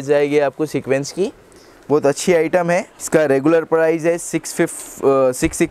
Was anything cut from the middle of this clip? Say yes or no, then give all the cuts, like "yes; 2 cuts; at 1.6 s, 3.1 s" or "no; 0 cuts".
no; 0 cuts